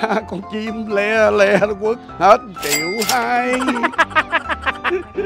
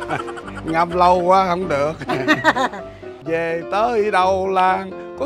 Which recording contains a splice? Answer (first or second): second